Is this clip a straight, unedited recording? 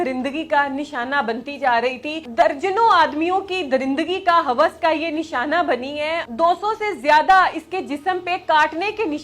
no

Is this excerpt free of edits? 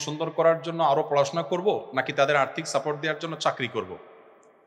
yes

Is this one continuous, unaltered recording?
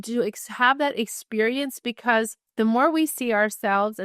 no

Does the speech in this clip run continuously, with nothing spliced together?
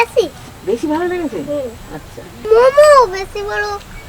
yes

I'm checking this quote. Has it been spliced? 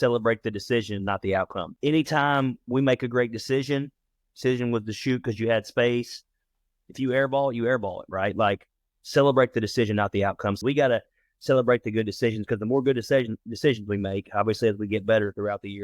yes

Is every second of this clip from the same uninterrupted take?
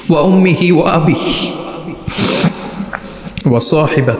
no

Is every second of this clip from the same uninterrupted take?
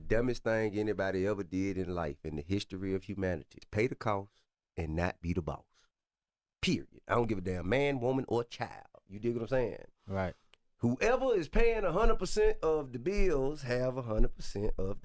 no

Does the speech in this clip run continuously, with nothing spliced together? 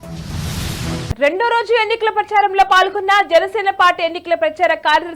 no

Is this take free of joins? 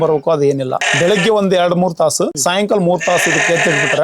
no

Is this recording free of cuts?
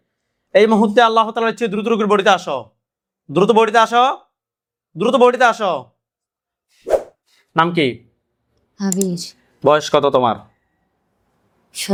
yes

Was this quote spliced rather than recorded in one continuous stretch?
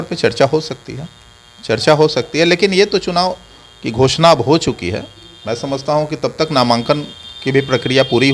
no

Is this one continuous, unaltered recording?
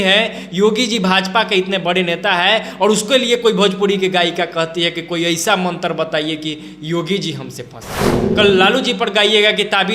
no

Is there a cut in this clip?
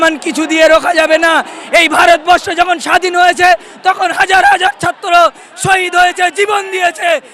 no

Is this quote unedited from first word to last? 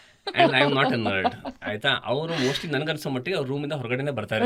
yes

